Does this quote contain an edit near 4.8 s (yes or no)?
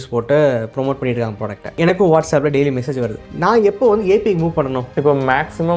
yes